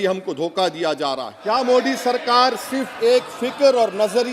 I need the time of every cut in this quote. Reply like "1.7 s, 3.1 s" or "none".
1.4 s

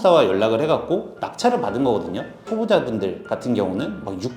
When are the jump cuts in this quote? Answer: 2.4 s

